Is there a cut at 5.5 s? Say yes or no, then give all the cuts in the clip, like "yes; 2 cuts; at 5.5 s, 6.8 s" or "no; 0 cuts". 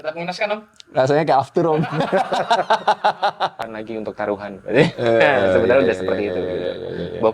no; 1 cut; at 3.7 s